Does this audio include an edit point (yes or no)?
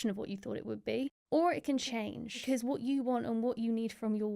yes